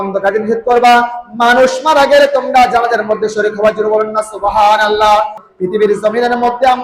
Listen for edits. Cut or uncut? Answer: cut